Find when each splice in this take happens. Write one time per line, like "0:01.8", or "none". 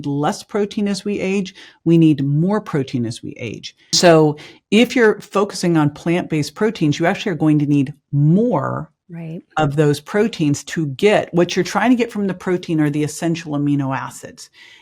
0:04.0